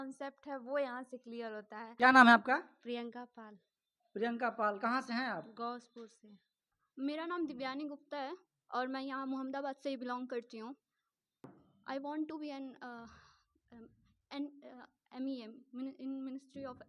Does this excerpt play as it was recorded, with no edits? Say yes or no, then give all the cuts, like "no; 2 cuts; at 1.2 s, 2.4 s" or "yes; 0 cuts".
no; 3 cuts; at 1.8 s, 6.6 s, 11.7 s